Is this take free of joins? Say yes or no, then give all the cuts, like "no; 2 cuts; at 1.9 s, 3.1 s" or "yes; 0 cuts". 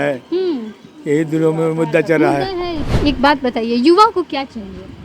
no; 1 cut; at 2.8 s